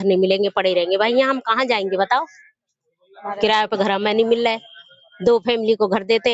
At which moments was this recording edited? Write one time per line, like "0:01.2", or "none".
none